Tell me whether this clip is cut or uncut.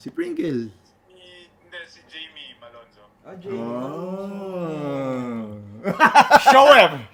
uncut